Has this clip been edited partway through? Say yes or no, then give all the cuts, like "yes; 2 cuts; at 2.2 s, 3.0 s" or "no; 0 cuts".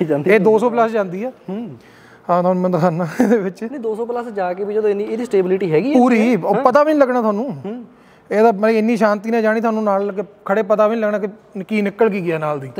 no; 0 cuts